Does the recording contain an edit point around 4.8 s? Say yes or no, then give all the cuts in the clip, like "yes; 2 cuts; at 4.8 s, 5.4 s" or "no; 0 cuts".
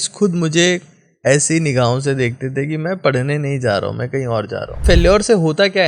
yes; 1 cut; at 4.8 s